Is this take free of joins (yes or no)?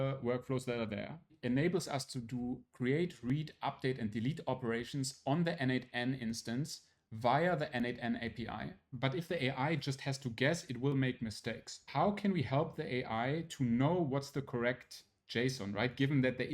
no